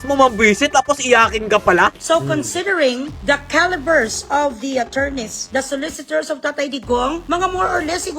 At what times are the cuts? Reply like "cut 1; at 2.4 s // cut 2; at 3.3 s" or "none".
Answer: cut 1; at 2.0 s // cut 2; at 5.4 s // cut 3; at 7.2 s